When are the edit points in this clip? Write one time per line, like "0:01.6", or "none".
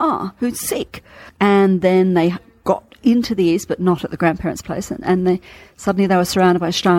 0:01.2

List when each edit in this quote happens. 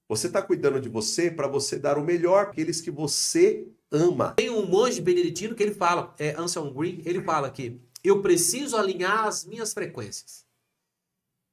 0:02.5
0:04.4

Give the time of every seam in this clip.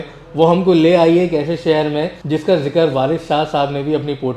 0:02.2

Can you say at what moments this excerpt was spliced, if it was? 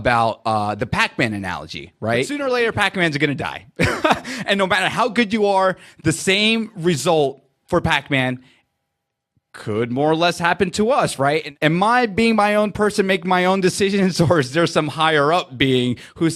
0:02.3
0:11.5

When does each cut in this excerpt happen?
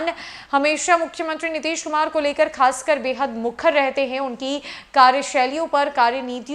none

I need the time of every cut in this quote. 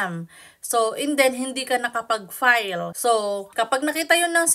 0:02.9
0:03.5

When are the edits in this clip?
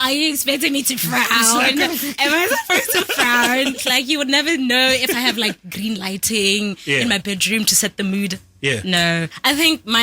0:03.8

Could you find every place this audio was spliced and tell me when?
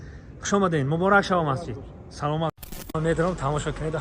0:02.7

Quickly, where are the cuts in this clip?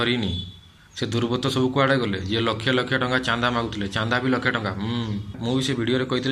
0:05.4

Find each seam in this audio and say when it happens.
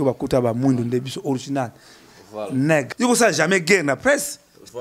0:02.9

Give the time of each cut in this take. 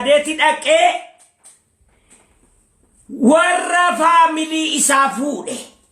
none

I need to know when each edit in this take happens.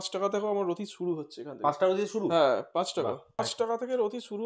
none

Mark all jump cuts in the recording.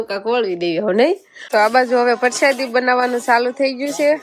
0:01.3

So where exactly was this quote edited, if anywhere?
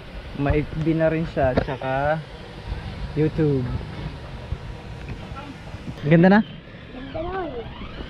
0:06.0

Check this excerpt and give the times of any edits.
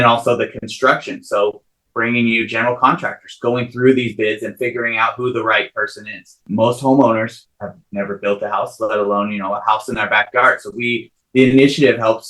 0:06.4

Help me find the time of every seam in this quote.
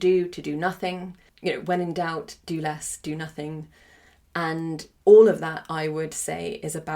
0:01.2
0:04.9

